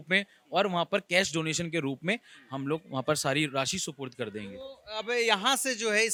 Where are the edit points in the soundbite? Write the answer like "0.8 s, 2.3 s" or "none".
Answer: none